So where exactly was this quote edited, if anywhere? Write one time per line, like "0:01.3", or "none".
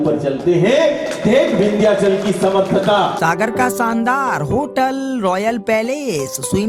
0:03.1